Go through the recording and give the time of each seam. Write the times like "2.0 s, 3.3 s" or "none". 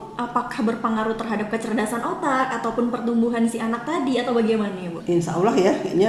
none